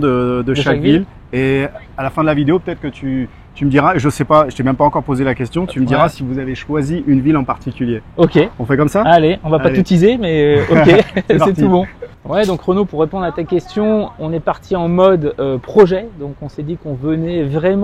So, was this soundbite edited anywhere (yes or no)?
no